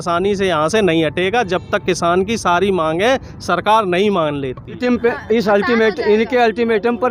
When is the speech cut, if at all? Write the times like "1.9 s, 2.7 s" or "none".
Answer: 4.8 s